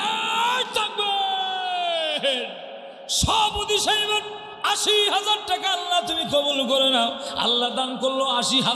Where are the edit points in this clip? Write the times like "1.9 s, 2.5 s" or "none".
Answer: 7.3 s

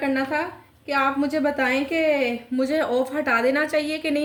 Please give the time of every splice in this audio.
none

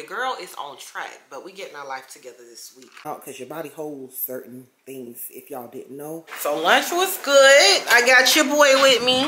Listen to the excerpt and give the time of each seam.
3.1 s, 6.3 s

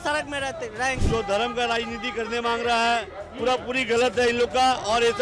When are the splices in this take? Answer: 1.0 s

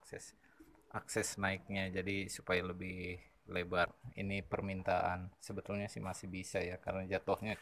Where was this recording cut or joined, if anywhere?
4.0 s

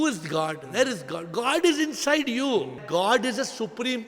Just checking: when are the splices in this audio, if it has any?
2.8 s

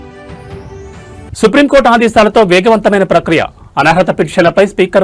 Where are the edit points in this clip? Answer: none

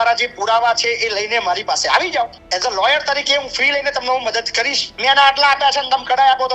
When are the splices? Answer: 2.4 s, 4.9 s

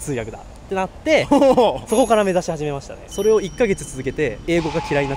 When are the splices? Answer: 3.0 s

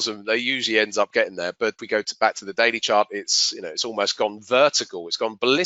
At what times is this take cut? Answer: 1.8 s

